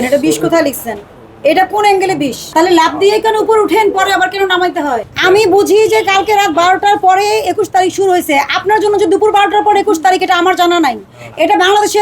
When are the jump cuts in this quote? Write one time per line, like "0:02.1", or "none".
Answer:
0:02.5
0:05.1